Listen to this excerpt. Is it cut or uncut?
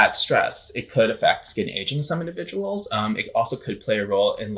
uncut